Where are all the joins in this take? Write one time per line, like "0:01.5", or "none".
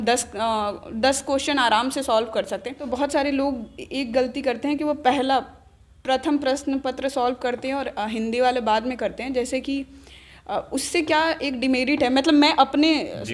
0:02.8